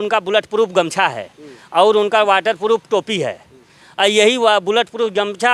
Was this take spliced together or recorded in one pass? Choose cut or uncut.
uncut